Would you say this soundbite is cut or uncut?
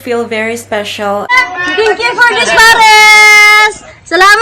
cut